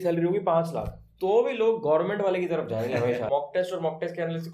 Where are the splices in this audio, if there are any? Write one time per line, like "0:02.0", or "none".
0:03.3

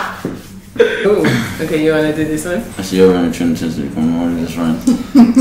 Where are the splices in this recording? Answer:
0:01.0

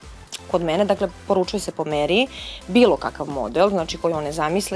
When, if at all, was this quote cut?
none

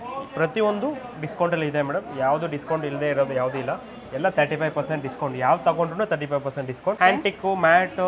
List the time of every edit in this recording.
0:07.0

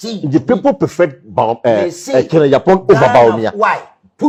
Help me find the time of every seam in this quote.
none

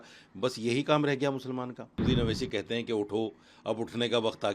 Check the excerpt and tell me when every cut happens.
0:02.0

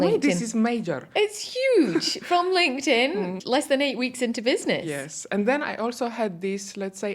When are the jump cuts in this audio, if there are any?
0:03.3

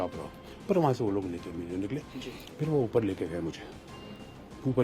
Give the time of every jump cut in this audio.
0:02.2

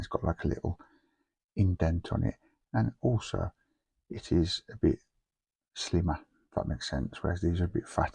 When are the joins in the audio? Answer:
none

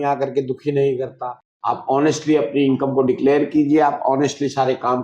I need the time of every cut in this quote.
none

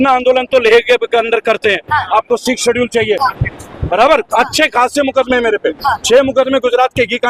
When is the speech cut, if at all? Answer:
0:03.2

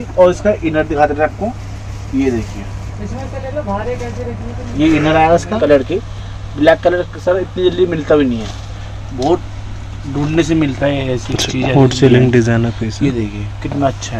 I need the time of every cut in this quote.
0:05.6

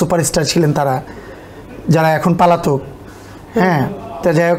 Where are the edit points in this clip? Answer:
none

